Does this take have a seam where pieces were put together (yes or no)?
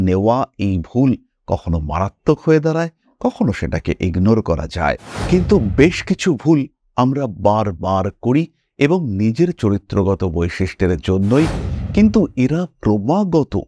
yes